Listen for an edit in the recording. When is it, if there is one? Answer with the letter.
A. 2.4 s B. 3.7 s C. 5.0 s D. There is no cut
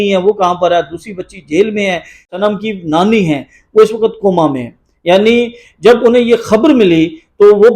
A